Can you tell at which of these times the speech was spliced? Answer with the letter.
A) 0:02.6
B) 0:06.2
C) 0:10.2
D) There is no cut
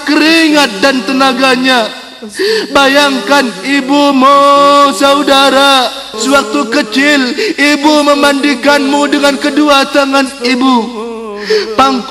B